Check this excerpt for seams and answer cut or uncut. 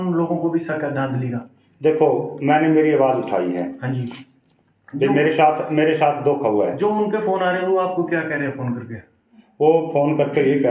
uncut